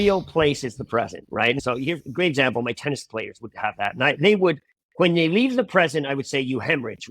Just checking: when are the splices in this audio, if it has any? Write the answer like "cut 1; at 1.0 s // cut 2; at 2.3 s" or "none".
cut 1; at 1.6 s